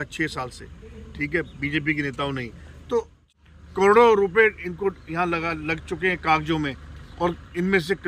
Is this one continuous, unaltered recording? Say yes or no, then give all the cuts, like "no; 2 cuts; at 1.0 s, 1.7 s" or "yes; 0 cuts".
no; 1 cut; at 3.3 s